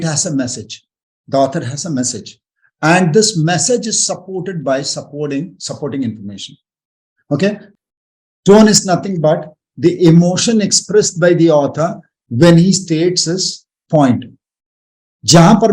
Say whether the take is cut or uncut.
cut